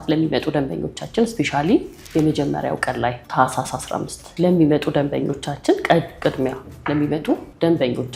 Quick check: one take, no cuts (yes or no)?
yes